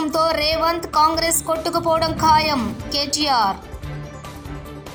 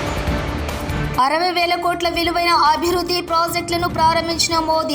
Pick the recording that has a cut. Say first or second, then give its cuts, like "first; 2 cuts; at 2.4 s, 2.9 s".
second; 1 cut; at 1.0 s